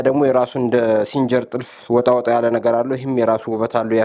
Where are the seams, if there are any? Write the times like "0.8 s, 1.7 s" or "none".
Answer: none